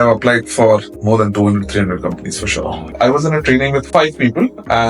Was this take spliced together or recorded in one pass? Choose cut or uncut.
cut